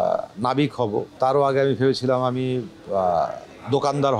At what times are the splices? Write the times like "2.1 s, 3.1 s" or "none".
1.2 s